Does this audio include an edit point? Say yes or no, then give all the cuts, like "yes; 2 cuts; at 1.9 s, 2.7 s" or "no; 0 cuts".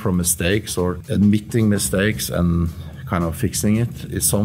yes; 1 cut; at 1.0 s